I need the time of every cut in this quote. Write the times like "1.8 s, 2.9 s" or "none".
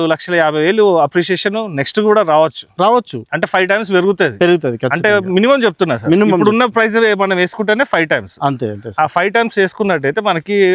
none